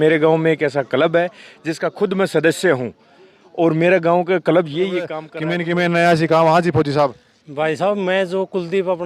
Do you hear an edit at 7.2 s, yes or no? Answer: no